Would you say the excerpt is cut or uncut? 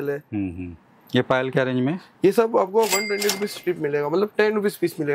uncut